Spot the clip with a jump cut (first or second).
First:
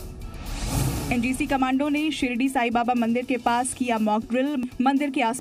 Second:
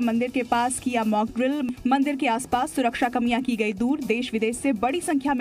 first